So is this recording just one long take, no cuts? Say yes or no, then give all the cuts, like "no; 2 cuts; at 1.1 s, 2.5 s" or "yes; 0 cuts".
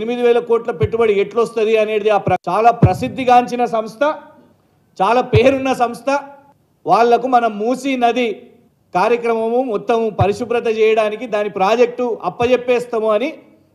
no; 1 cut; at 2.4 s